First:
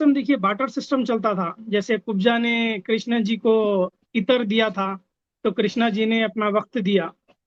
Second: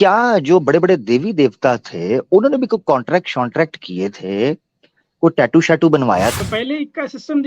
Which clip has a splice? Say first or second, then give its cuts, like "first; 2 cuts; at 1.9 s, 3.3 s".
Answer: second; 1 cut; at 6.4 s